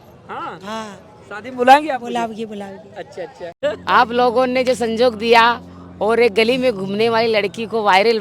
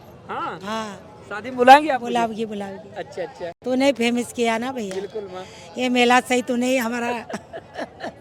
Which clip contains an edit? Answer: first; 1 cut; at 3.4 s

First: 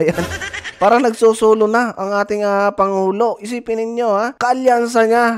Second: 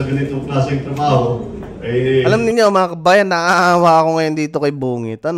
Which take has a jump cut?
first; 1 cut; at 4.3 s

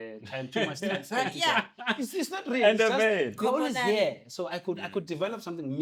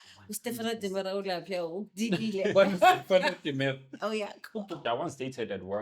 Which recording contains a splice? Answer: second; 1 cut; at 4.8 s

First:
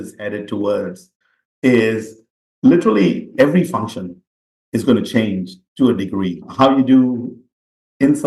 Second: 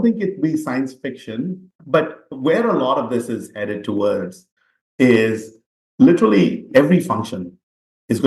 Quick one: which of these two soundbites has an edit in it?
second; 1 cut; at 1.7 s

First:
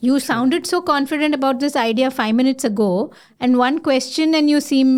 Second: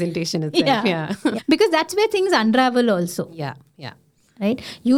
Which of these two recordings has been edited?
second; 1 cut; at 1.4 s

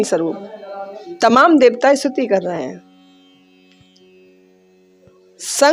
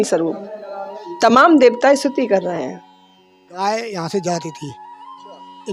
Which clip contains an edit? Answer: second; 1 cut; at 3.5 s

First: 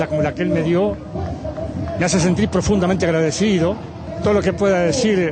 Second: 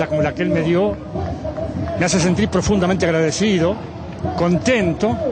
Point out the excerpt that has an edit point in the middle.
first; 1 cut; at 4.1 s

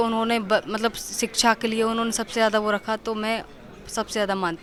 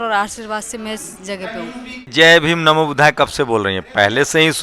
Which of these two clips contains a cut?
second; 1 cut; at 2.1 s

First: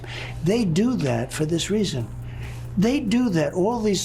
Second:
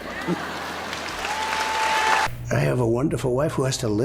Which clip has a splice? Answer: second; 1 cut; at 2.4 s

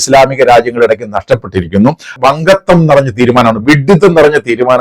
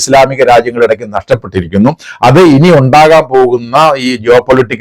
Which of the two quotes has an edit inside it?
first; 1 cut; at 2.2 s

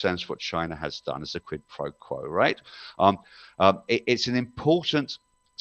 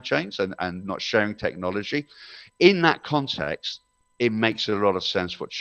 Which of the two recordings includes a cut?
first; 1 cut; at 3.4 s

